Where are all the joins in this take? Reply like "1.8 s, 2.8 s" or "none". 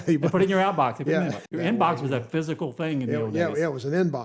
1.4 s